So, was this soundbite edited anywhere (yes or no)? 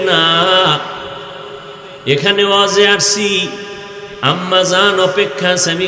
no